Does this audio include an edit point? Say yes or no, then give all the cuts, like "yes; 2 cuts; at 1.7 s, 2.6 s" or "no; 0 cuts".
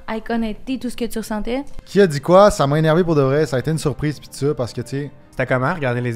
yes; 2 cuts; at 1.8 s, 5.2 s